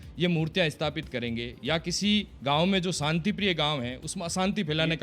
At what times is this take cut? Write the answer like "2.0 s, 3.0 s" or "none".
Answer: none